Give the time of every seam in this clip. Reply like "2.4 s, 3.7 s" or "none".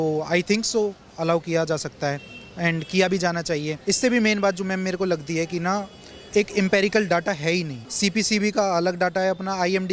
3.7 s, 7.8 s